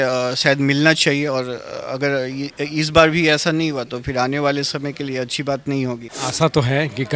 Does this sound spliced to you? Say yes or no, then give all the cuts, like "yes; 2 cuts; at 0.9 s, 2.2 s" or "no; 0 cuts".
yes; 1 cut; at 6.1 s